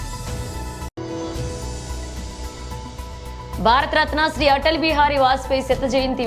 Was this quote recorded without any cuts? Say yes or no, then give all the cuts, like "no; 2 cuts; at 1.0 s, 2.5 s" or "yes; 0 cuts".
yes; 0 cuts